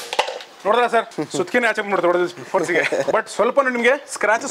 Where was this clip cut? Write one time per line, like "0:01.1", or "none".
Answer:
none